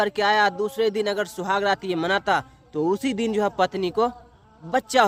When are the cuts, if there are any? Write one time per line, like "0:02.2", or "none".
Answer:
none